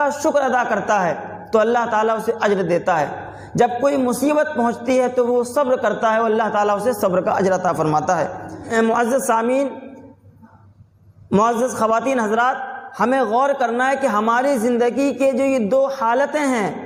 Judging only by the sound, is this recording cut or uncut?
uncut